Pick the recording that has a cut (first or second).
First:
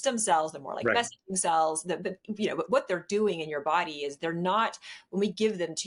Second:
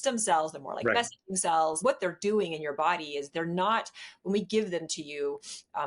second